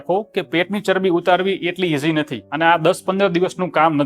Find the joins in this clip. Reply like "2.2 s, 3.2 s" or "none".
2.4 s